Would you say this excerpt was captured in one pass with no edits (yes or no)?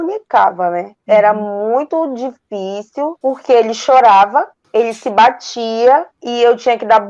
no